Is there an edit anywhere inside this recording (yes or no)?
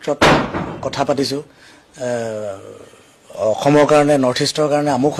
no